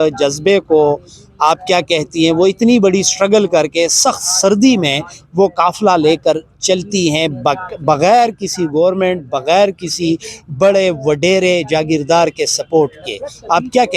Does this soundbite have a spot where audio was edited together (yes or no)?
no